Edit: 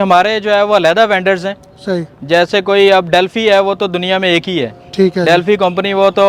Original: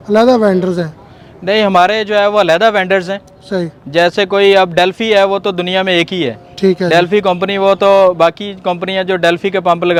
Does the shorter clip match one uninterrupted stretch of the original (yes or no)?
yes